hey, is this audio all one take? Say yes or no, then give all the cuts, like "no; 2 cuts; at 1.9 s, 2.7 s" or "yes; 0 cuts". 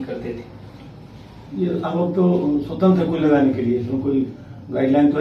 yes; 0 cuts